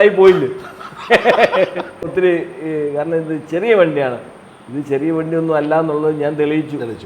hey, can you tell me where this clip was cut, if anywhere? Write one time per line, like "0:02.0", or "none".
0:02.1

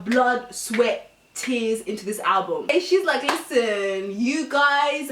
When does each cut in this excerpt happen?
0:02.7

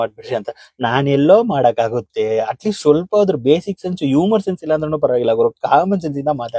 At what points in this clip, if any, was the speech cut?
none

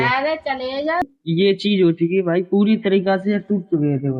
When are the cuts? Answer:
0:01.0

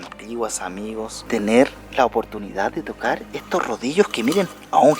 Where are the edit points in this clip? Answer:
0:01.2

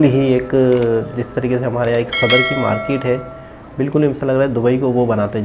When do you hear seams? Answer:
none

